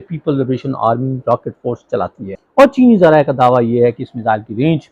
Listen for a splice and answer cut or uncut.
cut